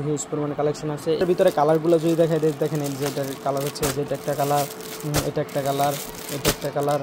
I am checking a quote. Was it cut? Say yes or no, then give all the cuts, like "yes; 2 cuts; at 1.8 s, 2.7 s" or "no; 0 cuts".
yes; 1 cut; at 1.2 s